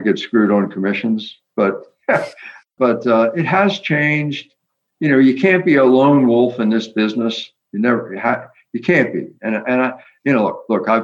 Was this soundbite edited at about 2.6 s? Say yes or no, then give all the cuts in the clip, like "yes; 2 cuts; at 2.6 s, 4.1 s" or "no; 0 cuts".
yes; 1 cut; at 2.6 s